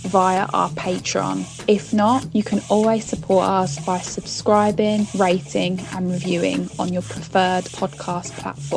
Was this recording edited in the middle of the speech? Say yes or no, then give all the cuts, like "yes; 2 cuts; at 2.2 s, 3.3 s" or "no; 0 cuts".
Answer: no; 0 cuts